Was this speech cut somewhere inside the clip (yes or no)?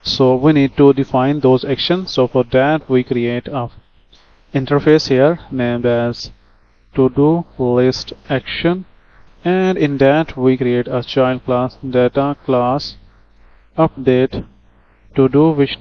no